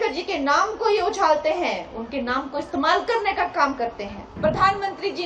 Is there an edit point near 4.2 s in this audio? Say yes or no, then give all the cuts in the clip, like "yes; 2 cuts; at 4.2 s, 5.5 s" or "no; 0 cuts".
yes; 1 cut; at 4.2 s